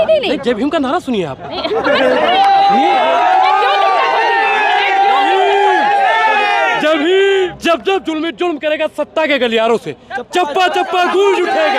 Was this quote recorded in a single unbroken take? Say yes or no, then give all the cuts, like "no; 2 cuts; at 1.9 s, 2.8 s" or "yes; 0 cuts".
no; 1 cut; at 7.5 s